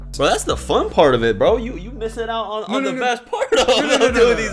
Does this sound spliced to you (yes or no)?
no